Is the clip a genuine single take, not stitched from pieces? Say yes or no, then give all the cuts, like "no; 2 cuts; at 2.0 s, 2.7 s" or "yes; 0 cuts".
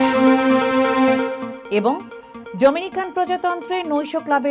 no; 1 cut; at 1.5 s